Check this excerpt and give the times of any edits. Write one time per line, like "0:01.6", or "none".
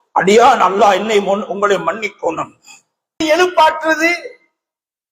0:03.2

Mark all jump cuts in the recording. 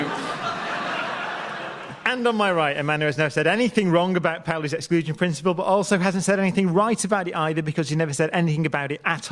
0:05.3

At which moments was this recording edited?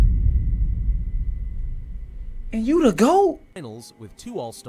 0:03.6

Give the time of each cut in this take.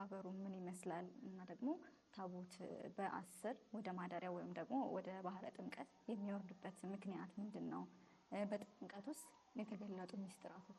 none

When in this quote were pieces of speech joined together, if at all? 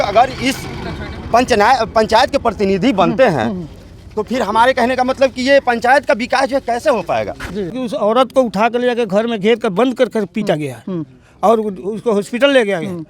0:07.8

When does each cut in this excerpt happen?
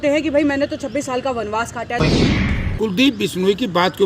0:02.3

